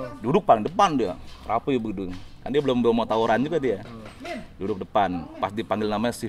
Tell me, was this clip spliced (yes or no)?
no